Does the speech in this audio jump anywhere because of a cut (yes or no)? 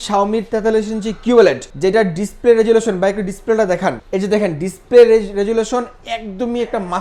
no